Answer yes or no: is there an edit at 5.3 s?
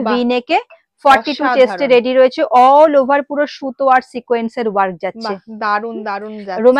no